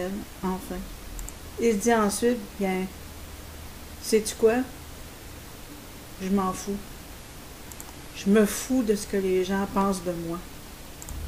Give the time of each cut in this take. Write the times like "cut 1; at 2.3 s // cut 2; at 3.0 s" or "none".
none